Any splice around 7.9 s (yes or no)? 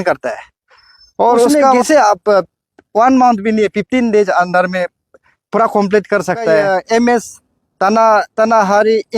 no